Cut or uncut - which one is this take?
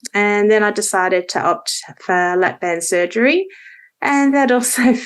uncut